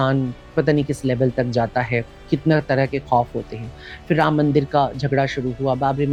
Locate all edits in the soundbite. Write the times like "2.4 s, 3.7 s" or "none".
none